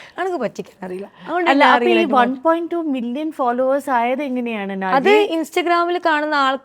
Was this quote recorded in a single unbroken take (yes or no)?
yes